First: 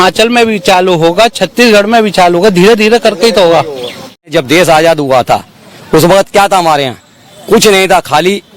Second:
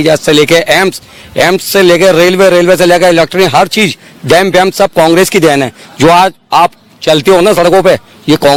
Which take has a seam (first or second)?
first